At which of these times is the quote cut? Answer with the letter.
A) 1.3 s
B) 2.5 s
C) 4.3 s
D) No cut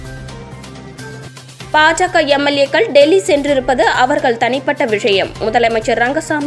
A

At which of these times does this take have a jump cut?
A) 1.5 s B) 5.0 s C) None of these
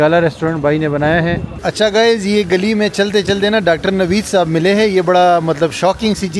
A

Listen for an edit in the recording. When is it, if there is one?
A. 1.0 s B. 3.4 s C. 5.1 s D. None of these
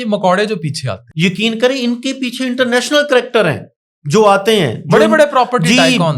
A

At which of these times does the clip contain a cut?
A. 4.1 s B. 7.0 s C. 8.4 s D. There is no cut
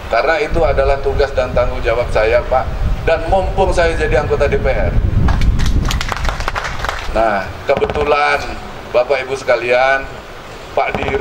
B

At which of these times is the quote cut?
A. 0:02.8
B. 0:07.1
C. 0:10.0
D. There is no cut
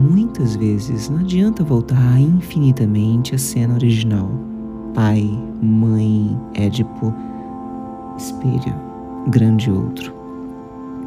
C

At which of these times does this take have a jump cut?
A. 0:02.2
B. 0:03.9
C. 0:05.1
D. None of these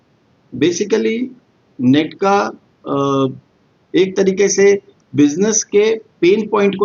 D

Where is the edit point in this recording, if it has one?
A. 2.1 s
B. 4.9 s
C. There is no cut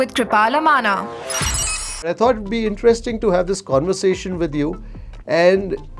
A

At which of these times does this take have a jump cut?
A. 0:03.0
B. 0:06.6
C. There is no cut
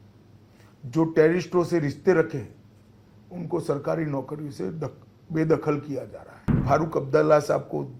B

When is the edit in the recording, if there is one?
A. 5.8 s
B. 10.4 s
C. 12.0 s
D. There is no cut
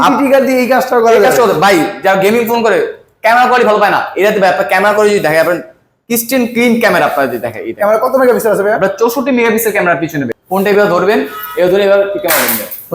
B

